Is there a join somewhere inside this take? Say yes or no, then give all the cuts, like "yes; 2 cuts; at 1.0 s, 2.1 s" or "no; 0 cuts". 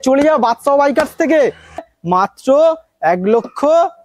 yes; 1 cut; at 1.9 s